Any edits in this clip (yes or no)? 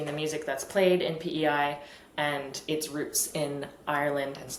no